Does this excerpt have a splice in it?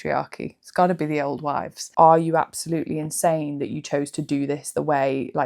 yes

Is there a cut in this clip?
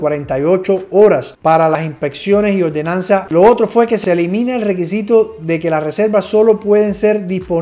yes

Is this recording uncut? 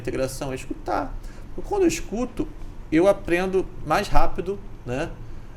yes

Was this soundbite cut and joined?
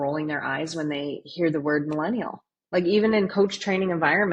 no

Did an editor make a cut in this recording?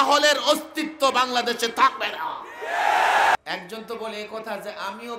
yes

